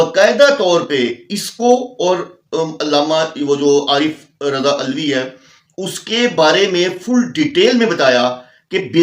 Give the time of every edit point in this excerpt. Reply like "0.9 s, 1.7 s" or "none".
none